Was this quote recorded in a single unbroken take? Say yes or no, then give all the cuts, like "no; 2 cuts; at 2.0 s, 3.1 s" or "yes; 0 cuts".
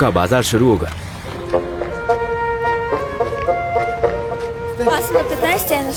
yes; 0 cuts